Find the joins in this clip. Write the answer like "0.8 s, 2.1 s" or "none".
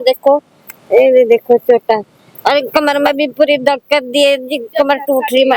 none